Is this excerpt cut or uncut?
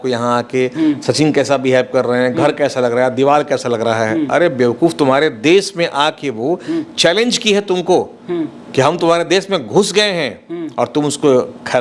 uncut